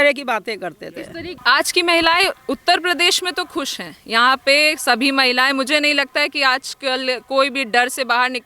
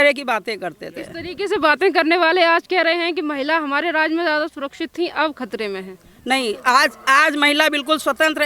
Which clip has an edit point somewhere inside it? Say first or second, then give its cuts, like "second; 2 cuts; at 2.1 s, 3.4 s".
first; 1 cut; at 1.3 s